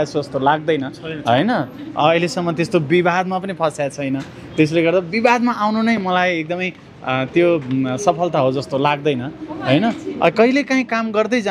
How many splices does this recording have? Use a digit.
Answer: 0